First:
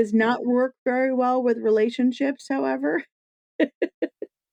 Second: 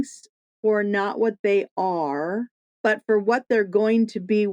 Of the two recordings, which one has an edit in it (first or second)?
second